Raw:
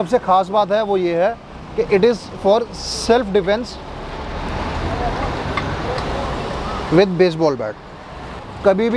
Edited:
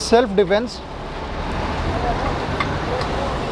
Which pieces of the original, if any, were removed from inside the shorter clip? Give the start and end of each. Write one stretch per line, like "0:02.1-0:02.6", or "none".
none